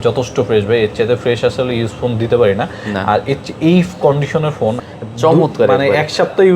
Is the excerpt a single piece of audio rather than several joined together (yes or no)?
no